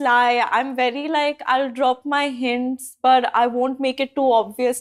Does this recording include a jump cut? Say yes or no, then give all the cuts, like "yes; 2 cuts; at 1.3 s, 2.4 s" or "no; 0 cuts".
no; 0 cuts